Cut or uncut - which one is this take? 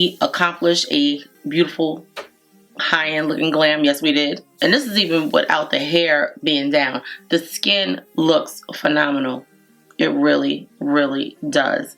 uncut